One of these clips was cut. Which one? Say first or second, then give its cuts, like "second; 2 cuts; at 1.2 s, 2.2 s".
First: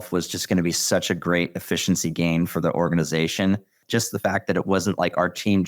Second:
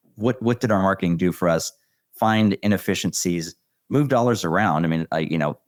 first; 1 cut; at 3.8 s